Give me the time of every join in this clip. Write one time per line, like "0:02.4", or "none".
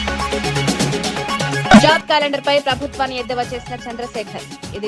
0:01.7